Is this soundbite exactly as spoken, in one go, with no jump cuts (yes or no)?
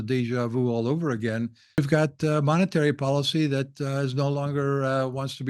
no